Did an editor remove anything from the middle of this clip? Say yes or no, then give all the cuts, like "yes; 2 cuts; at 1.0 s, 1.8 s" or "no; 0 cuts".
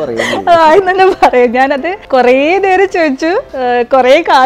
yes; 2 cuts; at 1.9 s, 3.5 s